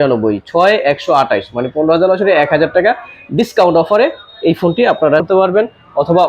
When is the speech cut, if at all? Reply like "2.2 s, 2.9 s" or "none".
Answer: 5.2 s